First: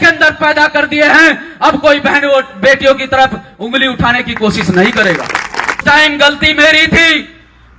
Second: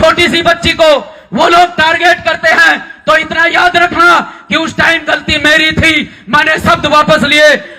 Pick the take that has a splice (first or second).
first